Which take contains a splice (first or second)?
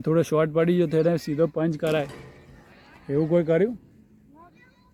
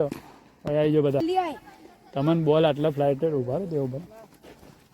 second